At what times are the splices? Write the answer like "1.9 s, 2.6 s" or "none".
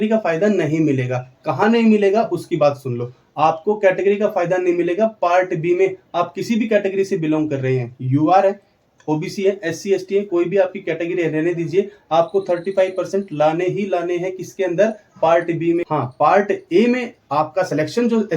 none